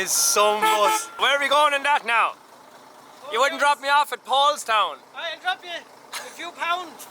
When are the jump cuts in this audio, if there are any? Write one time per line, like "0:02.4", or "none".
0:01.1